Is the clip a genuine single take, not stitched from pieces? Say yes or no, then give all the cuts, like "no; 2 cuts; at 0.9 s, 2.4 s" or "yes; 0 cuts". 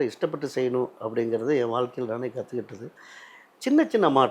yes; 0 cuts